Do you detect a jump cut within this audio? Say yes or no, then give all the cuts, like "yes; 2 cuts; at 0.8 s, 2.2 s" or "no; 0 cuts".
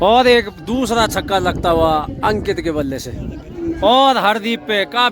yes; 1 cut; at 3.8 s